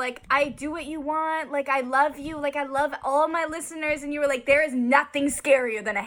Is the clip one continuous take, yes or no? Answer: yes